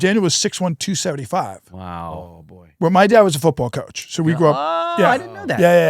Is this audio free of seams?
yes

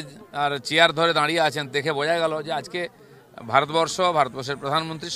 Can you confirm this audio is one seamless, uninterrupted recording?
yes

